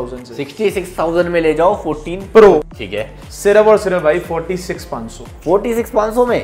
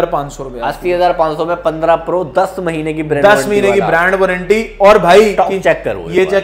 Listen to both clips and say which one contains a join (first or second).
first